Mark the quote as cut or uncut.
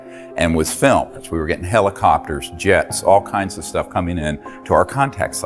cut